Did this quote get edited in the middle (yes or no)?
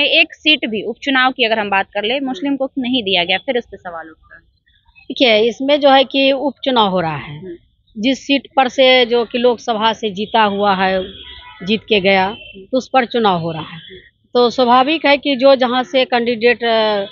no